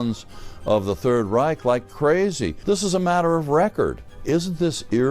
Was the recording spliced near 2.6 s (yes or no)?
yes